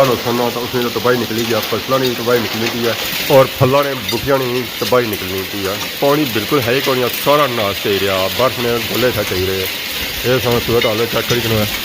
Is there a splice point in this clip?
no; 0 cuts

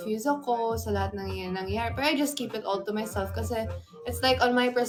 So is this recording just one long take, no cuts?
yes; 0 cuts

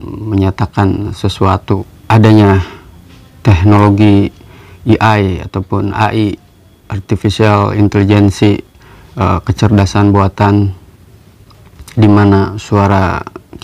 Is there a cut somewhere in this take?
yes; 1 cut; at 1.7 s

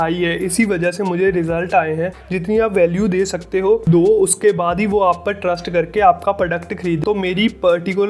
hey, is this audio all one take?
no; 2 cuts; at 2.1 s, 7.0 s

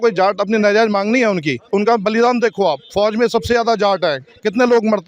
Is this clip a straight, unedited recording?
no; 1 cut; at 1.6 s

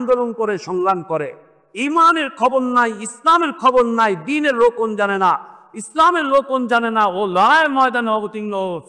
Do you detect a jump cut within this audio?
no; 0 cuts

